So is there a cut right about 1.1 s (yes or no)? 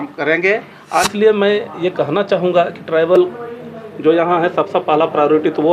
yes